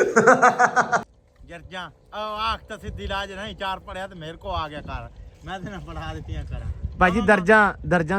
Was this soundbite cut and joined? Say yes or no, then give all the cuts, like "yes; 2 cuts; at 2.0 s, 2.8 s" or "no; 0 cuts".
yes; 1 cut; at 1.0 s